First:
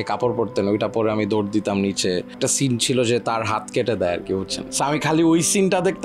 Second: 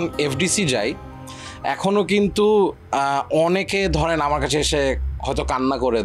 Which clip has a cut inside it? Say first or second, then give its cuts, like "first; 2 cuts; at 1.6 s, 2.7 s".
first; 2 cuts; at 2.4 s, 4.6 s